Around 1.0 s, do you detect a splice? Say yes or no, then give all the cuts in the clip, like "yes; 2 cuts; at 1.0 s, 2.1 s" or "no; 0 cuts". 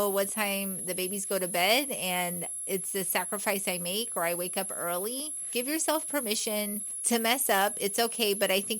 no; 2 cuts; at 5.5 s, 6.9 s